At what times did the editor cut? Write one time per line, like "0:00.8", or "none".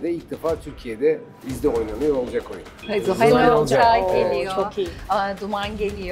0:01.5
0:02.8

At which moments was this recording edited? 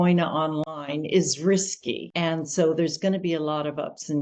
0:02.1

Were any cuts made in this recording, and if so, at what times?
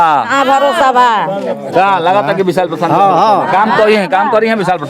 none

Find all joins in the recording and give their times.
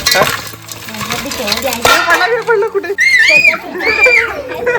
0:03.1

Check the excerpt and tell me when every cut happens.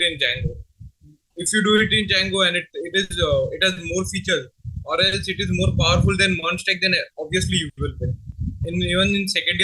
none

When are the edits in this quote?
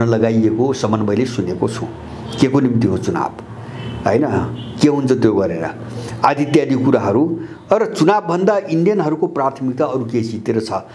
none

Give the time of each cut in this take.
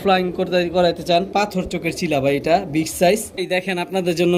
0:03.4

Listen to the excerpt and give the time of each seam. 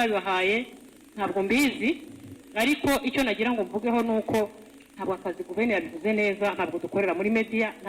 none

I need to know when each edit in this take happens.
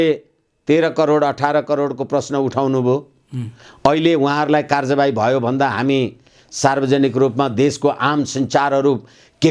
none

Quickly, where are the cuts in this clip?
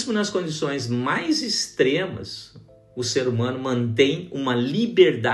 none

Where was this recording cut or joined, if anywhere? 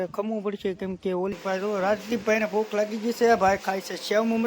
0:01.4

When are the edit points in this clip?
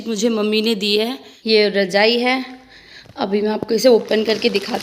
0:01.3

